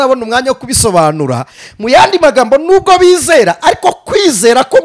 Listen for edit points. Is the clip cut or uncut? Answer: cut